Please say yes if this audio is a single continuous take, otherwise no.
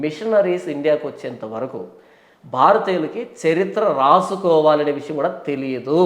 yes